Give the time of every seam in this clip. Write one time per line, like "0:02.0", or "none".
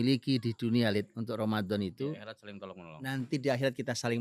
none